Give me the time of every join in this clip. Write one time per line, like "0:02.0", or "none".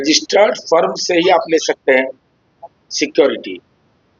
none